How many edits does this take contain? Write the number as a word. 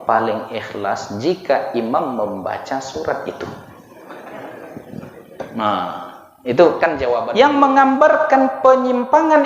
one